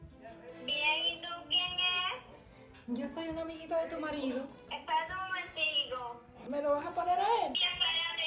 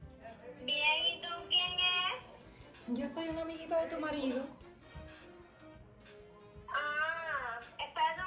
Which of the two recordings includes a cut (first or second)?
first